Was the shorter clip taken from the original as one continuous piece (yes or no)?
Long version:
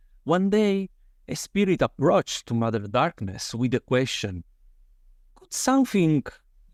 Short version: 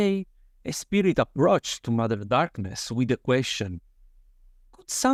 yes